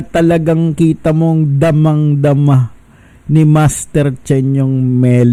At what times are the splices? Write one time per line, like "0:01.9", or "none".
none